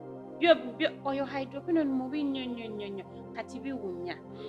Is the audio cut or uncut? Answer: uncut